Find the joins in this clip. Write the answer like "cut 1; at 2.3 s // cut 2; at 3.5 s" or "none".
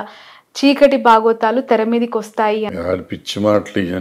cut 1; at 2.7 s